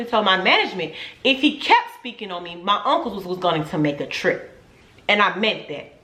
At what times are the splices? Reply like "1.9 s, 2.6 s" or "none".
none